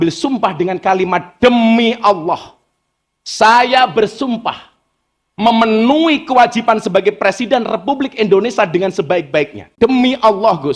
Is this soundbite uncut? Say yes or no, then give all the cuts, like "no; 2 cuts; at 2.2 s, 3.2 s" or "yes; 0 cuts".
no; 1 cut; at 9.7 s